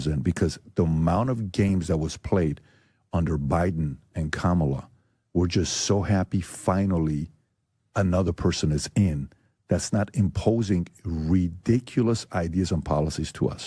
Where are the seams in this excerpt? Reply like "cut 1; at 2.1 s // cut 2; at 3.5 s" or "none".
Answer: none